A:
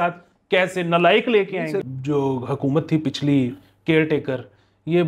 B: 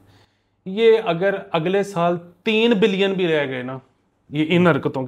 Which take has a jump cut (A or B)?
A